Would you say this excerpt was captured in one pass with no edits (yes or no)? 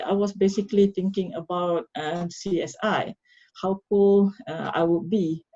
yes